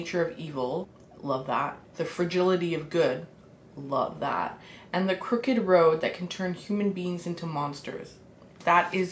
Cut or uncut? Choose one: cut